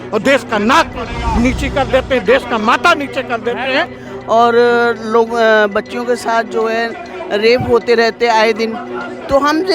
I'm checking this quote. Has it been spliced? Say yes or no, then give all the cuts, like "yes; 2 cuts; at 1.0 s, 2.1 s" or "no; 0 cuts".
yes; 1 cut; at 4.0 s